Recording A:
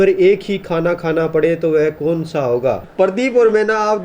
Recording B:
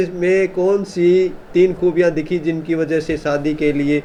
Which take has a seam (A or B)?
A